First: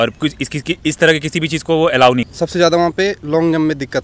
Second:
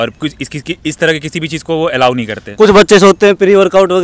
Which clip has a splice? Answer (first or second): first